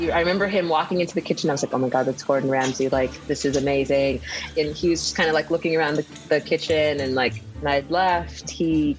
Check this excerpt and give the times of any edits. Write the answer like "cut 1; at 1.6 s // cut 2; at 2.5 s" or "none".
cut 1; at 4.3 s // cut 2; at 7.6 s